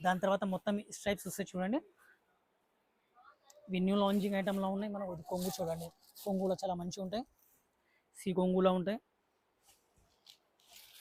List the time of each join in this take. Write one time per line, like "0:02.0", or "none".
none